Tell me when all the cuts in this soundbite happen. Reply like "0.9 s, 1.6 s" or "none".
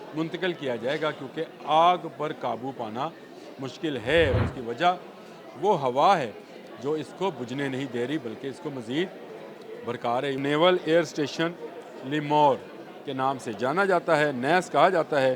4.4 s, 10.4 s